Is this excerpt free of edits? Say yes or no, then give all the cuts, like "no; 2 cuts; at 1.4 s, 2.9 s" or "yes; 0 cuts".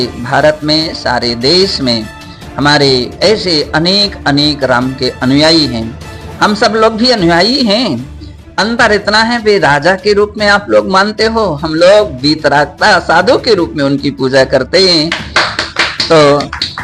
yes; 0 cuts